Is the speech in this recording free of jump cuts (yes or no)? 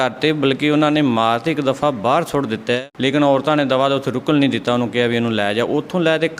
no